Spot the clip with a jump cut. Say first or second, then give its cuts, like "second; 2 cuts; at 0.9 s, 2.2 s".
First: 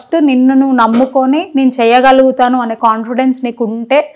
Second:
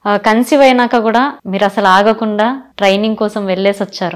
second; 2 cuts; at 1.4 s, 2.7 s